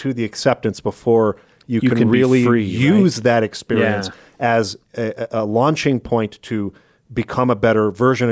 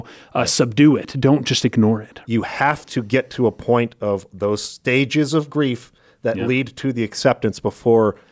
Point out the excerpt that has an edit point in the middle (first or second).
second